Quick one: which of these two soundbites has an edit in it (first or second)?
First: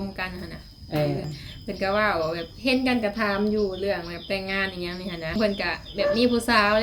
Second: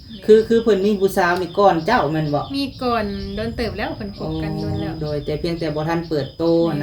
first